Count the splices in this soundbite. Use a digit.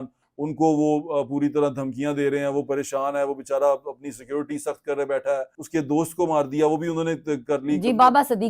1